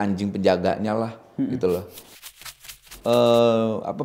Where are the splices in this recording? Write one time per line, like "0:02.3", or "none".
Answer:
0:02.3